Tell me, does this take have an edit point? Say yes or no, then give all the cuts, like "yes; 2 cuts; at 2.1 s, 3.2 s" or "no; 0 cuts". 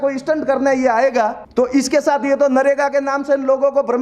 yes; 1 cut; at 1.4 s